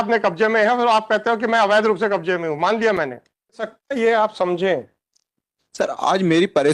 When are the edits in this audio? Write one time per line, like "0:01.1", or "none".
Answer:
0:03.8